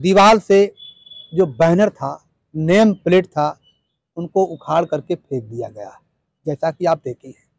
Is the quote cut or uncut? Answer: uncut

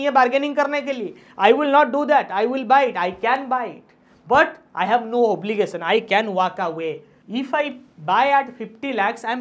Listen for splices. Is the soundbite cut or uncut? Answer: cut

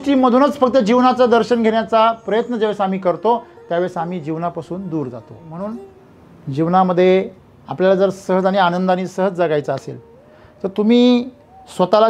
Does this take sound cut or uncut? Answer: cut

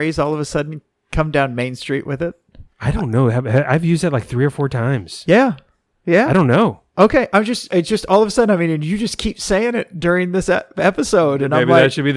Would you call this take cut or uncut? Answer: uncut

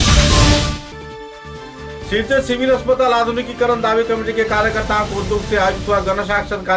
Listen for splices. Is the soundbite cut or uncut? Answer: cut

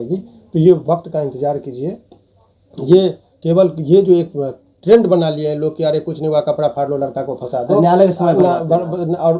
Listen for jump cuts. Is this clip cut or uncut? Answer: uncut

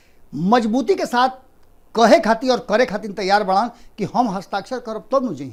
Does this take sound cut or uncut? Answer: uncut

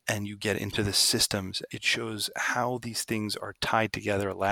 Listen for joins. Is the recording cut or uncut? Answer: cut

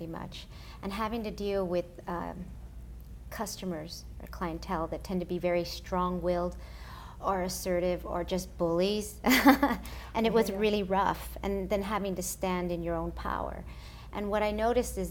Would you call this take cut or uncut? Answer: cut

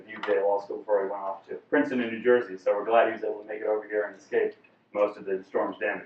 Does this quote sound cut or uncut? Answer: cut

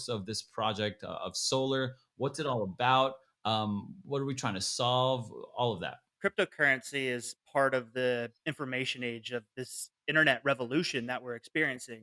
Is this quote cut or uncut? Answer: cut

